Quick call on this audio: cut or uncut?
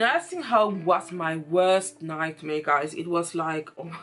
uncut